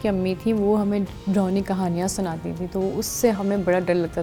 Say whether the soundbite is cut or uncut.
uncut